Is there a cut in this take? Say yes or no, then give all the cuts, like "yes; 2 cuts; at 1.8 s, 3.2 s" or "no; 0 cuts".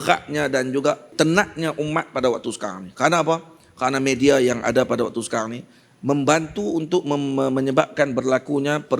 yes; 1 cut; at 1.1 s